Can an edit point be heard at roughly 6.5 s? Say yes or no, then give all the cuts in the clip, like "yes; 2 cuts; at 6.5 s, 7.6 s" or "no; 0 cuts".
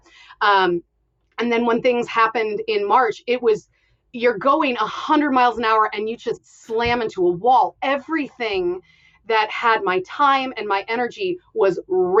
no; 0 cuts